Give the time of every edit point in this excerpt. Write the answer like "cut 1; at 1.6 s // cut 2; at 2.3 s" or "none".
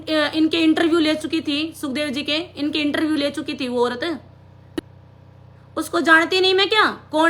none